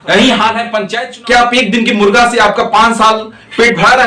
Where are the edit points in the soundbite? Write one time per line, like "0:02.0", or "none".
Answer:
0:01.0